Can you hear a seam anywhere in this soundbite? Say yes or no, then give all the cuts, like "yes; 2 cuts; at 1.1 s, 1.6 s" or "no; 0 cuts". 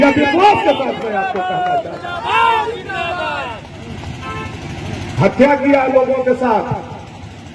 no; 0 cuts